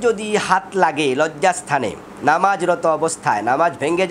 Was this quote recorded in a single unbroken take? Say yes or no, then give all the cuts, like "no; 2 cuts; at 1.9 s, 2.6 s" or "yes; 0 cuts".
yes; 0 cuts